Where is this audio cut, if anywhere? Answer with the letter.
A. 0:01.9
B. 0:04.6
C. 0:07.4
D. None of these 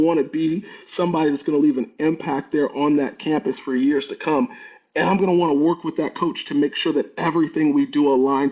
D